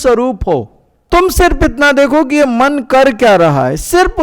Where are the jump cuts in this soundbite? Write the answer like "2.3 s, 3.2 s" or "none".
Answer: 0.9 s